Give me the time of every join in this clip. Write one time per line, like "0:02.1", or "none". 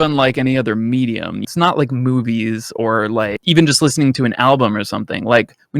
0:01.4
0:03.4